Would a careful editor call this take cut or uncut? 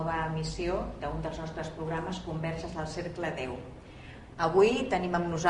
uncut